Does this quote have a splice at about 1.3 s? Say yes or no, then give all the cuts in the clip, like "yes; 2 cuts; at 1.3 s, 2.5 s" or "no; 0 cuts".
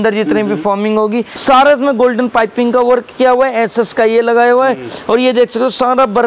yes; 1 cut; at 1.3 s